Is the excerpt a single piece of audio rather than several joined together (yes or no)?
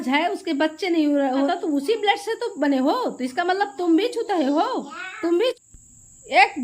no